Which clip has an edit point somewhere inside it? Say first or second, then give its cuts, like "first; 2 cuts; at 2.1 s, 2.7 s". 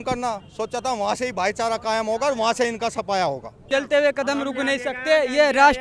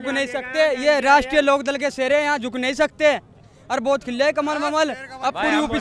first; 1 cut; at 3.5 s